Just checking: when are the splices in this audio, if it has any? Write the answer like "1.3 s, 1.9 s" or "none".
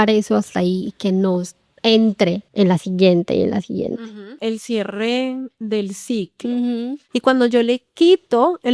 2.4 s, 4.4 s, 7.0 s